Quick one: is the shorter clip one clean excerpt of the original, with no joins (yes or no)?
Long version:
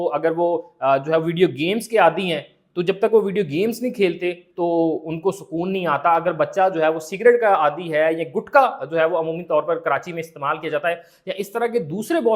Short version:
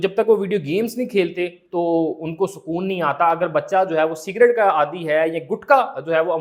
yes